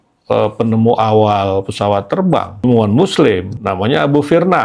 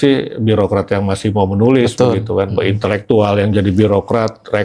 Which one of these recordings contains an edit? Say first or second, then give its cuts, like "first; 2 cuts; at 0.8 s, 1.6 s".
first; 2 cuts; at 2.6 s, 3.6 s